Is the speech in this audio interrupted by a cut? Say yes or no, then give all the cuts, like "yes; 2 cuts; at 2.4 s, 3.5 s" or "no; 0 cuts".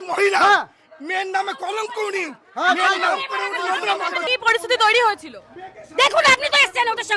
yes; 1 cut; at 4.3 s